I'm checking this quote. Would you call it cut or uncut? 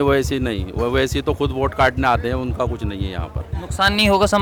uncut